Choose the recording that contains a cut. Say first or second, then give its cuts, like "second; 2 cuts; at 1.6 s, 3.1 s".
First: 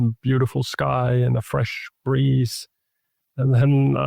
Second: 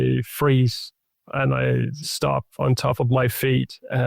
second; 1 cut; at 2.0 s